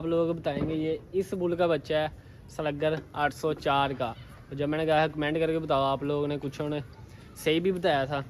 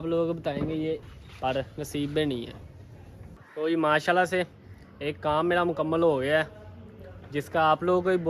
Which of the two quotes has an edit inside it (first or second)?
second